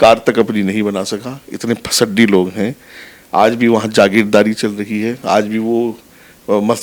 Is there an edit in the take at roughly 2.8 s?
no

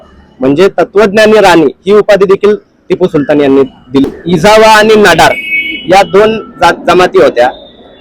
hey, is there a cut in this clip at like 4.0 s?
yes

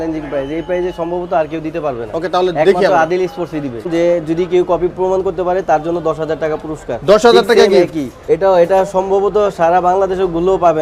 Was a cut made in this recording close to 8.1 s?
yes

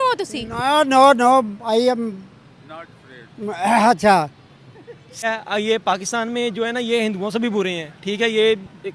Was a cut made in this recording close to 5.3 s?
yes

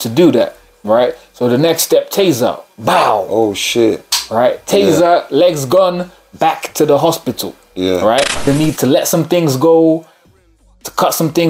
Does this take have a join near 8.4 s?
yes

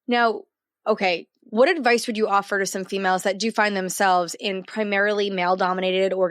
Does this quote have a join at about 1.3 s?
yes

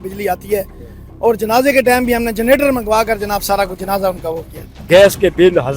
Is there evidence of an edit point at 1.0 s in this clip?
no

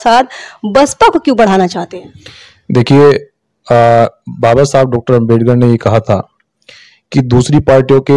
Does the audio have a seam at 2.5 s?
no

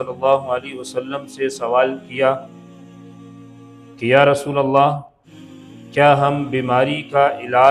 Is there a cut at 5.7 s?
no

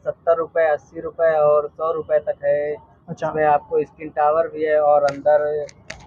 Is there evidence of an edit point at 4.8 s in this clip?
no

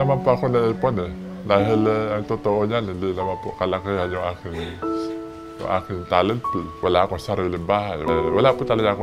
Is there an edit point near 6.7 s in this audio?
yes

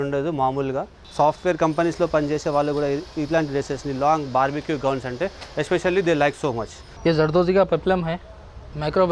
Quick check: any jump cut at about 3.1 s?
no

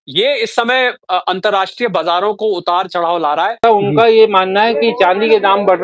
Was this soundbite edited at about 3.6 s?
yes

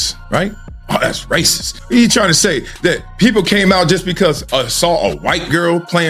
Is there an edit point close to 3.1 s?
no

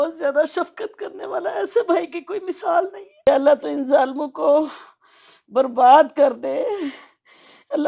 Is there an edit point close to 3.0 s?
yes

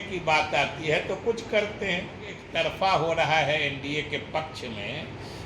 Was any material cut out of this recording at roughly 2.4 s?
yes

